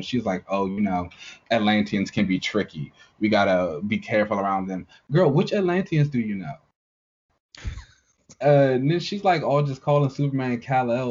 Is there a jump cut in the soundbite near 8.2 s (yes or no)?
yes